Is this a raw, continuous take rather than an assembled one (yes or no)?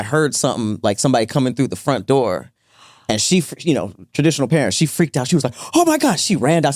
yes